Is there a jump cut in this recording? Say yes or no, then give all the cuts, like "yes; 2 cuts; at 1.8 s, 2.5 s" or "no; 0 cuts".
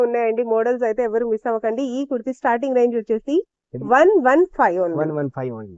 no; 0 cuts